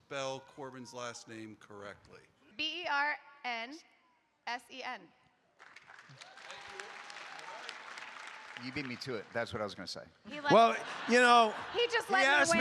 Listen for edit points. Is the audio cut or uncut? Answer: cut